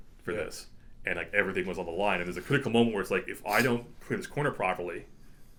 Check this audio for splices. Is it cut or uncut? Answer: uncut